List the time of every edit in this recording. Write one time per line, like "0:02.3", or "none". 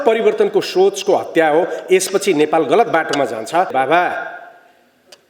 0:03.7